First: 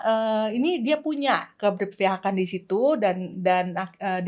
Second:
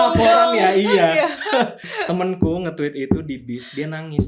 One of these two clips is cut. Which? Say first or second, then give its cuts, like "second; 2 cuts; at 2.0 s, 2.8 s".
second; 1 cut; at 1.9 s